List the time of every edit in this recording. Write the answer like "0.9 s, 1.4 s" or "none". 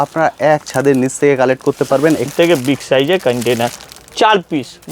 2.3 s